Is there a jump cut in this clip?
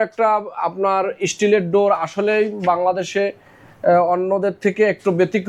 no; 0 cuts

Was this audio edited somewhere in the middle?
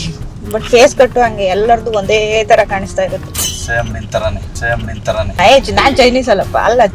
no; 0 cuts

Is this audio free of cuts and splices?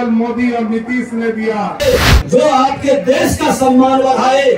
no; 1 cut; at 1.8 s

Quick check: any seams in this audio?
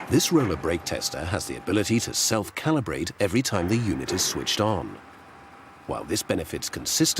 no; 0 cuts

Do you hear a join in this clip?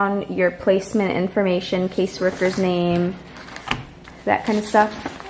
no; 0 cuts

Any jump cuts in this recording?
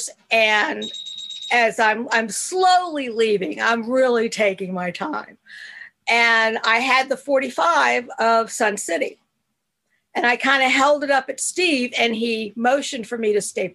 no; 0 cuts

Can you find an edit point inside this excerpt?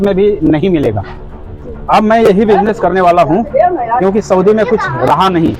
yes; 1 cut; at 1.1 s

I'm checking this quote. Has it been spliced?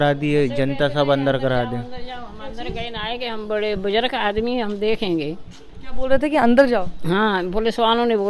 no; 0 cuts

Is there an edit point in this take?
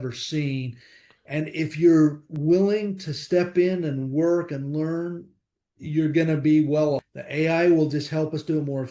yes; 1 cut; at 7.2 s

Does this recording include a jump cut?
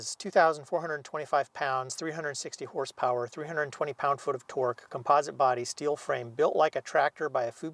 no; 0 cuts

